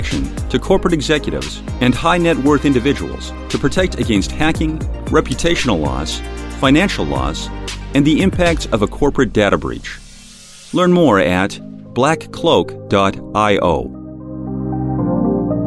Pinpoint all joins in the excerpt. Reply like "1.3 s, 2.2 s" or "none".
14.3 s